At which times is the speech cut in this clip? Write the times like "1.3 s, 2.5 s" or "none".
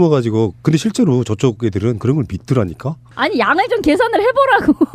3.3 s